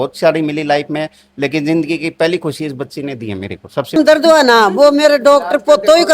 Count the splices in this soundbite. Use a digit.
1